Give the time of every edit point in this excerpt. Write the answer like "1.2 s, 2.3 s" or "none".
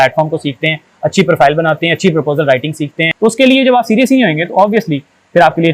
3.0 s